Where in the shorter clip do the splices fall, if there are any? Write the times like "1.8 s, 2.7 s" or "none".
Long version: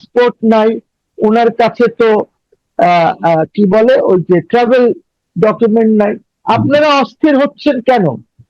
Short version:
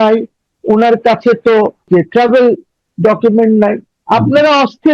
1.9 s

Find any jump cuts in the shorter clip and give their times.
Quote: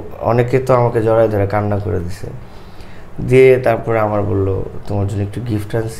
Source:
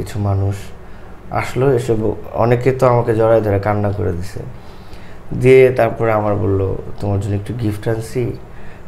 none

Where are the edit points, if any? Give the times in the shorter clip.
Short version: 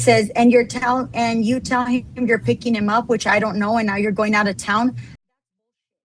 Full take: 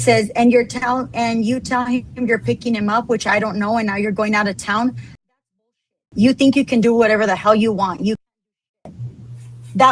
none

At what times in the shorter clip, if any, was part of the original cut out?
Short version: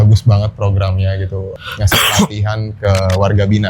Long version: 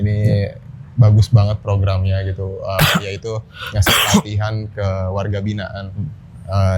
1.5 s

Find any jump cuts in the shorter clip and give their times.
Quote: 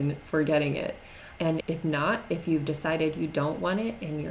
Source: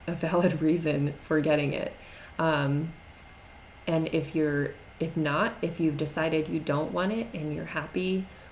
1.4 s

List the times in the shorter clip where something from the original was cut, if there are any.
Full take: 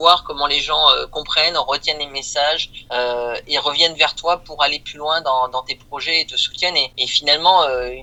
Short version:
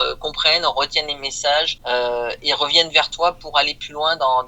1.8 s

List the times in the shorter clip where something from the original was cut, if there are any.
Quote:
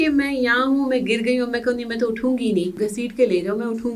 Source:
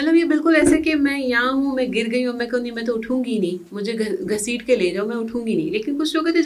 2.7 s

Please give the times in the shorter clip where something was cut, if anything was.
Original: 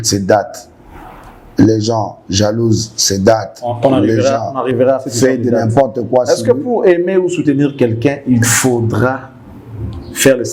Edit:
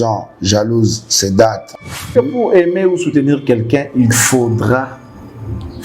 2.0 s

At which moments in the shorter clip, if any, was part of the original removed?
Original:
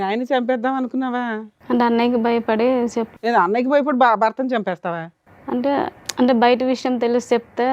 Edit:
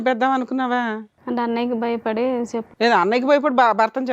none

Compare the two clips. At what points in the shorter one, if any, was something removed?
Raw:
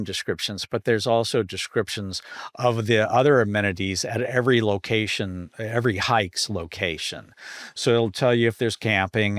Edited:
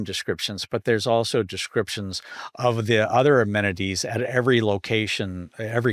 none

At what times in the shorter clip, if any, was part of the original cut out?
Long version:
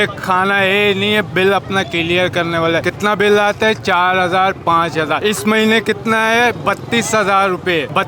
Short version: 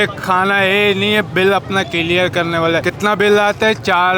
none

